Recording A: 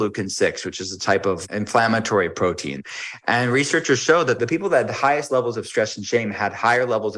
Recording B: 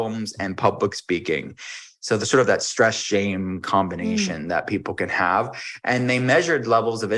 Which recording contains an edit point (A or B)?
A